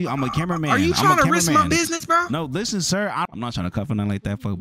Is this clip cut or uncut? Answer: cut